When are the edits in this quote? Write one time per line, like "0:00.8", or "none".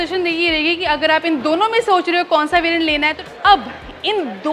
0:03.2